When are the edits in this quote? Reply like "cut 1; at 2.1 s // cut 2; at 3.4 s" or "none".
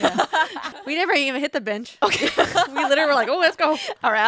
cut 1; at 0.9 s